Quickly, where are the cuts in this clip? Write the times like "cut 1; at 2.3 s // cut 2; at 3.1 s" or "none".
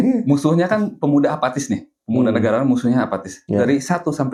none